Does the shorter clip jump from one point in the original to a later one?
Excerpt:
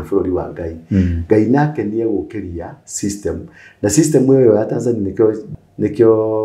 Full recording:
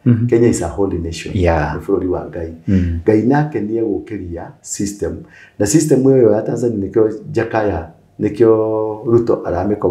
yes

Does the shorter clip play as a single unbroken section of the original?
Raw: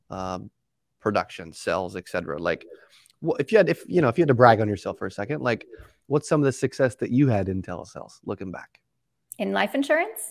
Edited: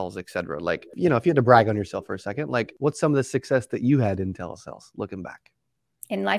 no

